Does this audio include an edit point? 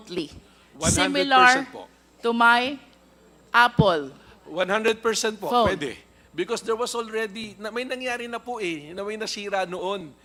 no; 0 cuts

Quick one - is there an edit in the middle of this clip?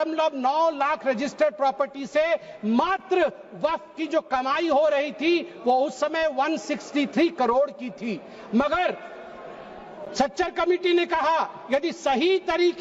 no; 0 cuts

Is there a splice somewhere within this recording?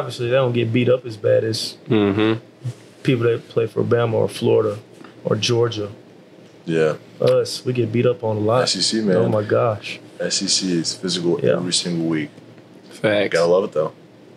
no; 0 cuts

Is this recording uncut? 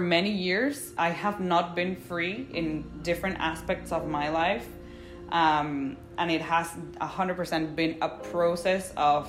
no; 1 cut; at 0.9 s

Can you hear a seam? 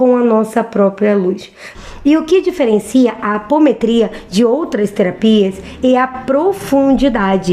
yes; 1 cut; at 1.7 s

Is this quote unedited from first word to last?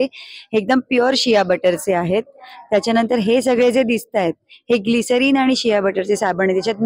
yes; 0 cuts

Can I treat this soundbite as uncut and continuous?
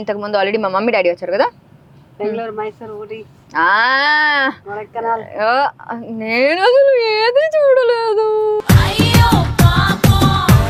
yes; 0 cuts

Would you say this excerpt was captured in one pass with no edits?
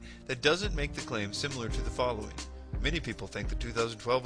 yes; 0 cuts

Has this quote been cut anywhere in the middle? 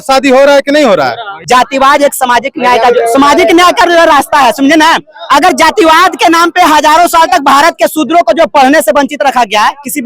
yes; 1 cut; at 1.3 s

